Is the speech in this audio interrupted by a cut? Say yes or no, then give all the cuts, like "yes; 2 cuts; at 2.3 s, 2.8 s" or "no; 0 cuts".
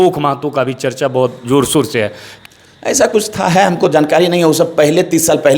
yes; 1 cut; at 2.3 s